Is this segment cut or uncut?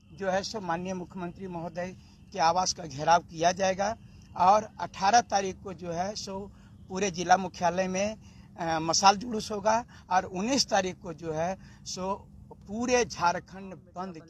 uncut